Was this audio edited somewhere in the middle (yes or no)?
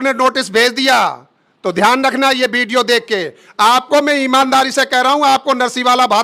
no